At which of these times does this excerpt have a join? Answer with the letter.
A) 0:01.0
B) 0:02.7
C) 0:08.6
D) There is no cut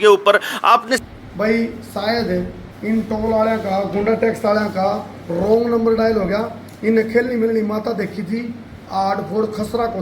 A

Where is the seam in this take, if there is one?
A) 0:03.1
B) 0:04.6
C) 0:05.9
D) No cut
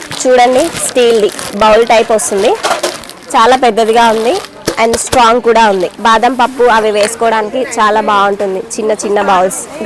C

